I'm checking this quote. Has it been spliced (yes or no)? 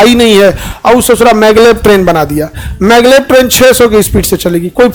no